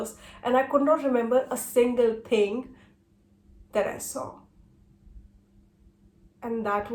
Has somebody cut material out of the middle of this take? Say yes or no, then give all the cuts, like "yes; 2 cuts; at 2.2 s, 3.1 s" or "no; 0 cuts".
no; 0 cuts